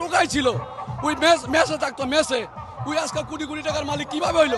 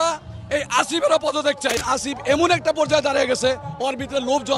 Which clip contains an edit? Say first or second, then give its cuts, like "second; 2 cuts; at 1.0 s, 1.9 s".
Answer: second; 1 cut; at 1.8 s